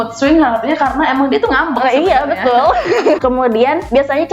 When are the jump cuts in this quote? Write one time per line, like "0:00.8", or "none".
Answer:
0:03.2